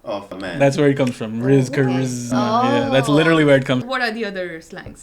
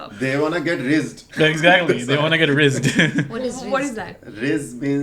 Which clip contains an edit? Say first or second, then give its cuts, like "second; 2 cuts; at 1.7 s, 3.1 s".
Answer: first; 1 cut; at 3.9 s